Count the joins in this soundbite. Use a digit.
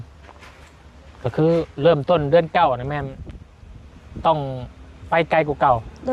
0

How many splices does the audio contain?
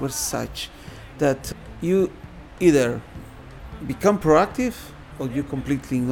1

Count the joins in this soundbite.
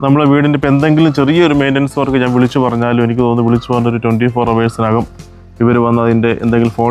0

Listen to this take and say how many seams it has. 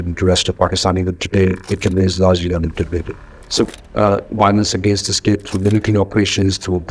2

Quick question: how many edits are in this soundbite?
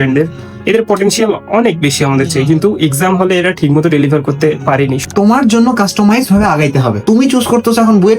2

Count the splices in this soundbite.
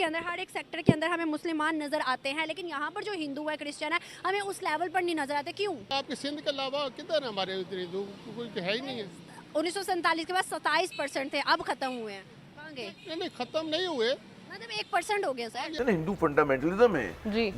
2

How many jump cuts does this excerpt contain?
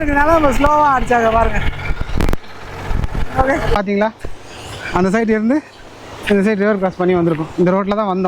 1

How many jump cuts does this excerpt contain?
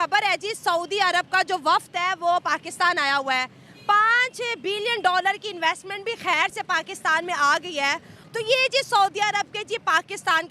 1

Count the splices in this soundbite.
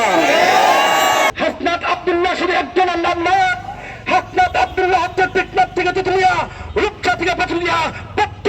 1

